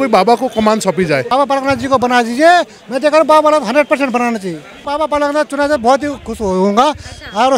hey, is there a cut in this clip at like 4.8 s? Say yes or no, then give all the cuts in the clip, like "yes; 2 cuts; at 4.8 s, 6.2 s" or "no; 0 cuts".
yes; 2 cuts; at 1.3 s, 4.8 s